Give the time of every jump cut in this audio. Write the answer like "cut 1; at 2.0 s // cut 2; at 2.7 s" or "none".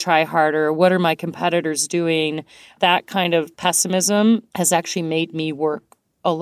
cut 1; at 2.6 s // cut 2; at 3.5 s // cut 3; at 4.5 s